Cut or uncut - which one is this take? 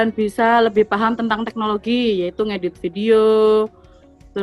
uncut